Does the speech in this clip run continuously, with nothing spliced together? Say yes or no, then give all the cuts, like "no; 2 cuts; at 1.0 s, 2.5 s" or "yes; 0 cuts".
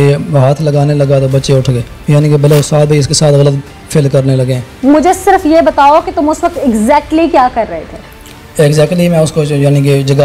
no; 1 cut; at 1.9 s